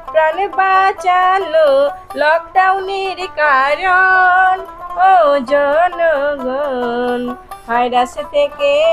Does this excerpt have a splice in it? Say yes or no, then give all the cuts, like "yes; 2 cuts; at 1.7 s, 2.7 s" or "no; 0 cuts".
no; 0 cuts